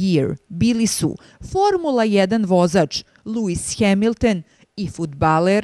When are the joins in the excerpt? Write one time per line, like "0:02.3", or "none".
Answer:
none